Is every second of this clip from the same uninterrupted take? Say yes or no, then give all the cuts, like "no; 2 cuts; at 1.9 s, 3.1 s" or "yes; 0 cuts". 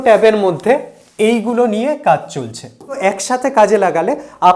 no; 1 cut; at 3.0 s